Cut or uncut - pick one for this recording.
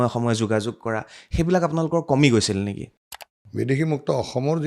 cut